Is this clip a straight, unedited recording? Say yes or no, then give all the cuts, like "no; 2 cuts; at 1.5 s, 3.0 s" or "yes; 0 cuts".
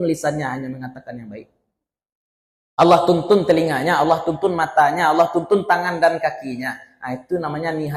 yes; 0 cuts